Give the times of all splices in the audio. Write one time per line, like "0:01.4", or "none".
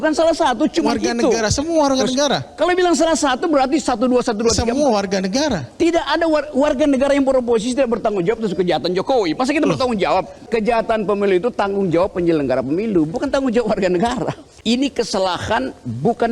0:10.4
0:14.4